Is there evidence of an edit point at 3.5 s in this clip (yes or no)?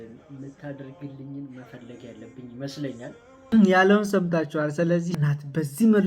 yes